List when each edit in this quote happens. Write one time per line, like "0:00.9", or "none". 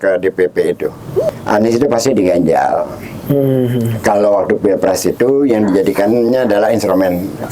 0:01.3